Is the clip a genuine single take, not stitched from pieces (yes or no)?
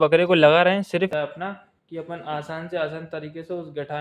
no